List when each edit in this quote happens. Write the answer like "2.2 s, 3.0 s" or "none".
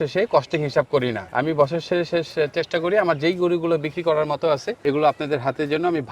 1.3 s, 4.8 s